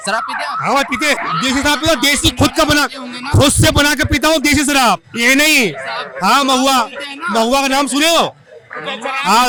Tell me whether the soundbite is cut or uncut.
uncut